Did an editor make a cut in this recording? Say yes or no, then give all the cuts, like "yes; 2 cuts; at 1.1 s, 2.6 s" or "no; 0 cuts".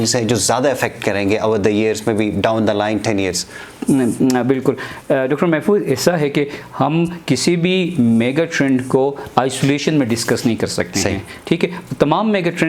no; 0 cuts